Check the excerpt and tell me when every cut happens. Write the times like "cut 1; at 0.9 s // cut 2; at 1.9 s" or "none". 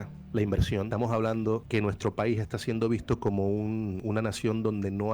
cut 1; at 0.9 s // cut 2; at 1.6 s // cut 3; at 4.0 s